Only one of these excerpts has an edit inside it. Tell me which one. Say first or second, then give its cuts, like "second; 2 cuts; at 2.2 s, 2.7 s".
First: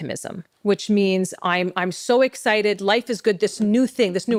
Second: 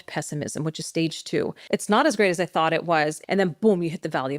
second; 2 cuts; at 1.6 s, 3.2 s